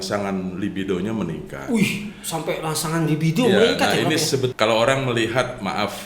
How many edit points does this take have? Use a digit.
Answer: 1